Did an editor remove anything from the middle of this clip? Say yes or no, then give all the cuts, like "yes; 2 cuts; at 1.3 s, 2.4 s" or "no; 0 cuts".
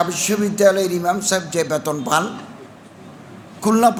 no; 0 cuts